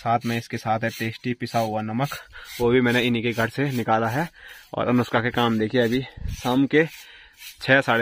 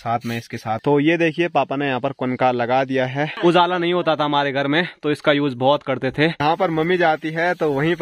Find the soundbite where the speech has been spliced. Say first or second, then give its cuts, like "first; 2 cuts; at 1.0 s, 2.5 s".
second; 3 cuts; at 0.8 s, 3.3 s, 6.4 s